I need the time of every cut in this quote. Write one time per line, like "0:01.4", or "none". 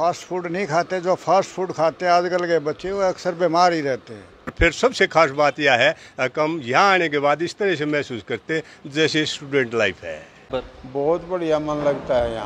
0:04.5
0:10.5